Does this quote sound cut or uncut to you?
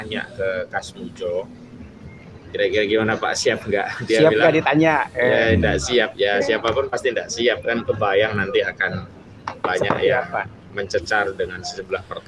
uncut